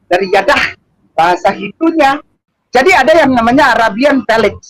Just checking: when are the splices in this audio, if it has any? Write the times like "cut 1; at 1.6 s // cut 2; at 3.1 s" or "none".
cut 1; at 2.5 s